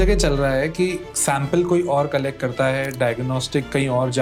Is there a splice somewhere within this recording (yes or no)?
no